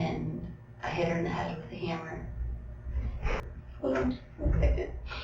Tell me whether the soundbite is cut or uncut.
cut